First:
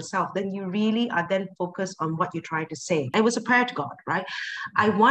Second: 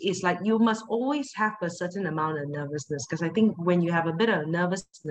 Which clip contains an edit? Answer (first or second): first